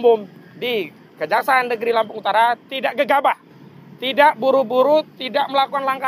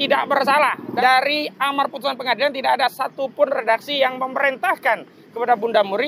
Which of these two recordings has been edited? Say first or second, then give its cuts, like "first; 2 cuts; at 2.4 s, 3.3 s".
second; 1 cut; at 1.0 s